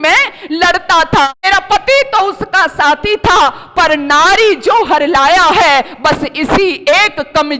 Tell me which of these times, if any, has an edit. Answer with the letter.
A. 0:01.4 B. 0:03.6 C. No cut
A